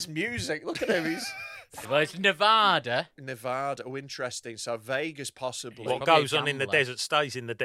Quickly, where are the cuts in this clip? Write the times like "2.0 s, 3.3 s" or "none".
1.9 s